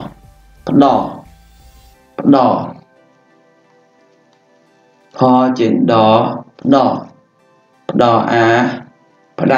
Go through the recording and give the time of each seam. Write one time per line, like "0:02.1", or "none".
0:03.0
0:05.1